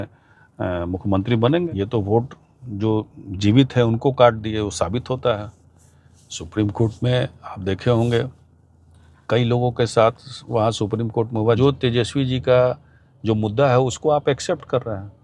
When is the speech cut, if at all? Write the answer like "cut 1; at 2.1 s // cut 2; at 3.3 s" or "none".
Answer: cut 1; at 1.7 s // cut 2; at 11.6 s